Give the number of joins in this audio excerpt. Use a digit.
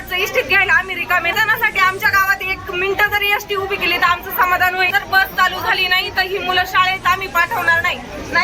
2